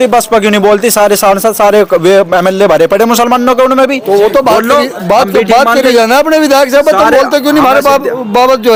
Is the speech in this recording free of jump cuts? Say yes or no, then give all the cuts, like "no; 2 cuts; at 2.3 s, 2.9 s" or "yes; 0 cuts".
yes; 0 cuts